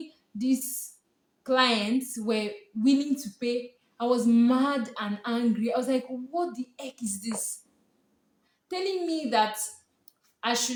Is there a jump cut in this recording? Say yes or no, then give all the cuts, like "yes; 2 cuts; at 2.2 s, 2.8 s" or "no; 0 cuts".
no; 0 cuts